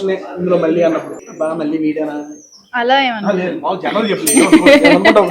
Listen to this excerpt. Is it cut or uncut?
cut